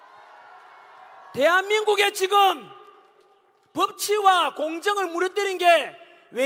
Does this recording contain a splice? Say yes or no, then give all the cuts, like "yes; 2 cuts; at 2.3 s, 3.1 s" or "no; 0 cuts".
no; 0 cuts